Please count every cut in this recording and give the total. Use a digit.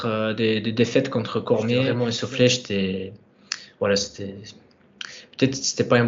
1